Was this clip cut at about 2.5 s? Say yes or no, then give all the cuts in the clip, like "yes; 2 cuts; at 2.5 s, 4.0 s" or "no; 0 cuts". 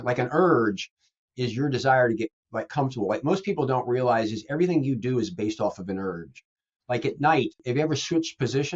no; 1 cut; at 7.6 s